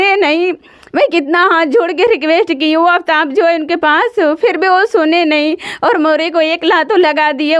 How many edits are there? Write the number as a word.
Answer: zero